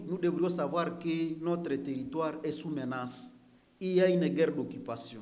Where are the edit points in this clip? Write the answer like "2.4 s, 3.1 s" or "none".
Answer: none